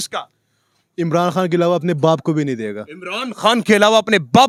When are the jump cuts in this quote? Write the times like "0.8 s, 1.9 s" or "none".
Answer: none